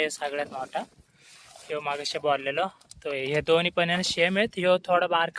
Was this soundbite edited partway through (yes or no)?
no